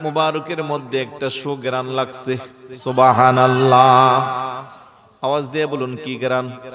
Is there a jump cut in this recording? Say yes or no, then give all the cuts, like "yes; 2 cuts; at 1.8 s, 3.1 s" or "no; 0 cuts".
no; 0 cuts